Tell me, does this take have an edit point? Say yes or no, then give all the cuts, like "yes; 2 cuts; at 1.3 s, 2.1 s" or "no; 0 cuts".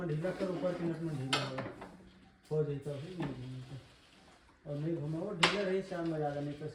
no; 0 cuts